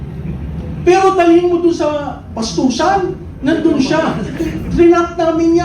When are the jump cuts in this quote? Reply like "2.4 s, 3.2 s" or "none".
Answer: 4.4 s